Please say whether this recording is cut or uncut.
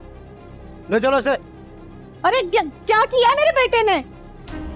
uncut